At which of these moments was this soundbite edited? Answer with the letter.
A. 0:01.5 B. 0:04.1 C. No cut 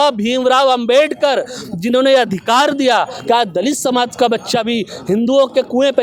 C